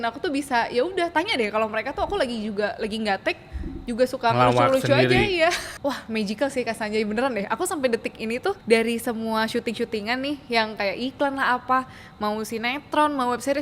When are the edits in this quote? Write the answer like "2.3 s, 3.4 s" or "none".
5.6 s, 8.6 s